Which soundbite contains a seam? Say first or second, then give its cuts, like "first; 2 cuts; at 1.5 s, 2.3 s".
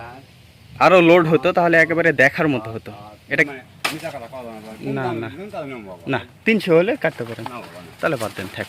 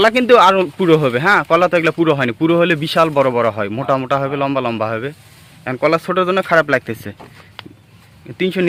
first; 1 cut; at 3.4 s